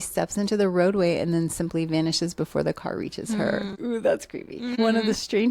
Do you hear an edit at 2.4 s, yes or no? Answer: no